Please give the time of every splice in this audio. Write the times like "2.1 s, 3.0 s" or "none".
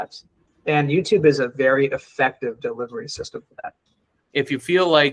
4.2 s